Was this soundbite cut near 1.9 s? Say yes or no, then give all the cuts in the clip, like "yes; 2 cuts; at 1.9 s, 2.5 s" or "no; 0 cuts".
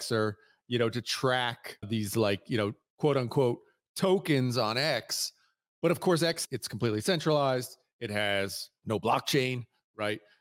yes; 3 cuts; at 1.9 s, 6.4 s, 8.7 s